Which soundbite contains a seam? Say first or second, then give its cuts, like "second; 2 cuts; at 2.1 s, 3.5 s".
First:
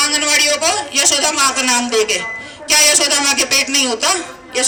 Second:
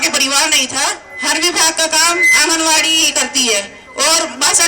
second; 1 cut; at 1.1 s